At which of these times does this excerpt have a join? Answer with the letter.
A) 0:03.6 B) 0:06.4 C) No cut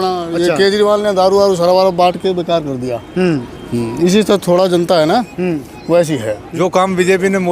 B